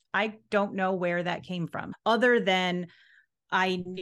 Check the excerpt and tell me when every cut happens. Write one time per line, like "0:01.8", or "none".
0:01.9